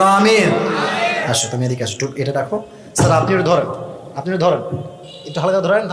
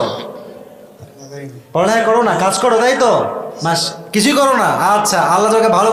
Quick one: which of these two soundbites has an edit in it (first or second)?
first